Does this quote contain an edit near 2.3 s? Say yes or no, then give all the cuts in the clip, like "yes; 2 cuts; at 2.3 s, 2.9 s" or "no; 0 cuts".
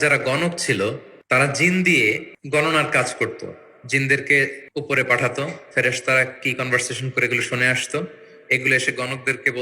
yes; 3 cuts; at 1.1 s, 2.3 s, 4.6 s